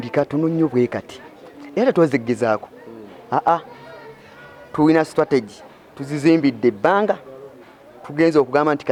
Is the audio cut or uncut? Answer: uncut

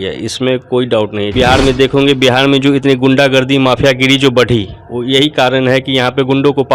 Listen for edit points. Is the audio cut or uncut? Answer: cut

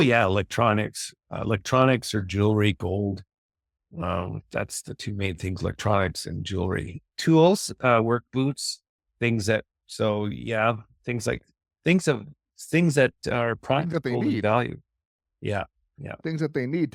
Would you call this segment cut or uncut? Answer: uncut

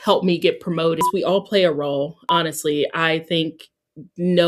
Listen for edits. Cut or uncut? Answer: cut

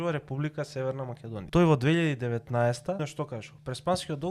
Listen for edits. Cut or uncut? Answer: cut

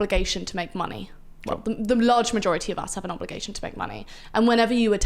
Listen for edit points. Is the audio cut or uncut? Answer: uncut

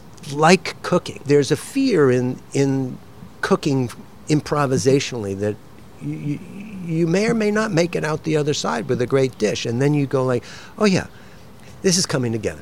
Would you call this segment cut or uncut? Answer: uncut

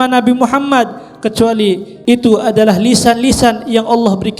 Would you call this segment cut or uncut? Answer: cut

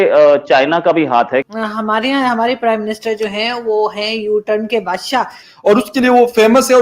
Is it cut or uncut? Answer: cut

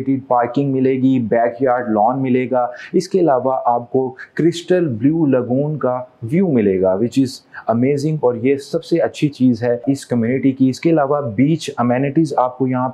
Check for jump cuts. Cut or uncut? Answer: uncut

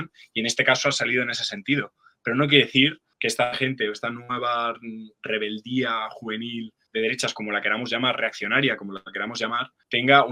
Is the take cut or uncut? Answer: uncut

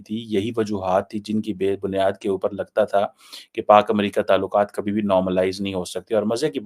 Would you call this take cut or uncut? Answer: uncut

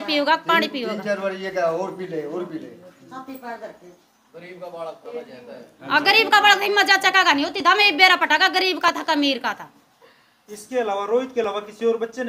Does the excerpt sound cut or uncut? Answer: uncut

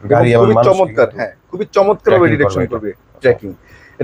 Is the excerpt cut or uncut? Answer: uncut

